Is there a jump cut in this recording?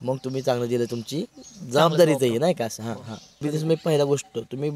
yes; 1 cut; at 3.4 s

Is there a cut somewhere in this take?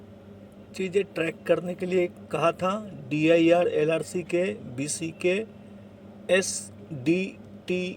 no; 0 cuts

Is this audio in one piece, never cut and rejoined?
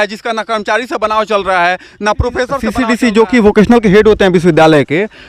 no; 1 cut; at 2.8 s

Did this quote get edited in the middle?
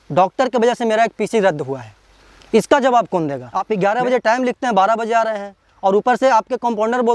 yes; 1 cut; at 3.7 s

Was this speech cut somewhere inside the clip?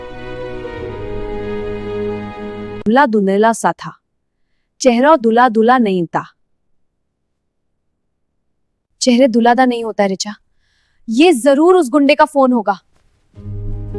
no; 0 cuts

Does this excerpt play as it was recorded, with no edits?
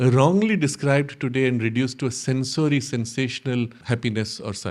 no; 1 cut; at 3.8 s

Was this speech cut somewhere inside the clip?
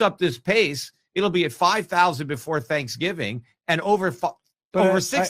no; 0 cuts

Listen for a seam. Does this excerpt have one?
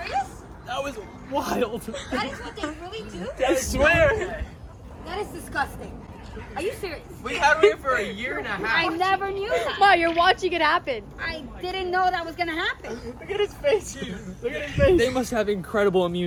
no; 0 cuts

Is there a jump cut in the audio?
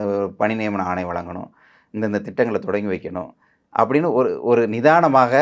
no; 0 cuts

